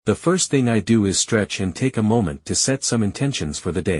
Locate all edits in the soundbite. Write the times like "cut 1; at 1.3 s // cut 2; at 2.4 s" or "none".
cut 1; at 1.5 s